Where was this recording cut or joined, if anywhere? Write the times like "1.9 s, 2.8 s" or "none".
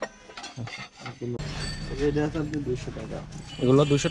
1.4 s